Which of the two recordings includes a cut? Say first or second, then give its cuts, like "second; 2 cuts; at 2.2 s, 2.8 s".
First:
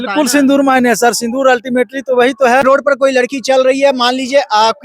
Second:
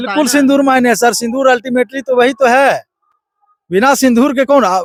first; 1 cut; at 2.6 s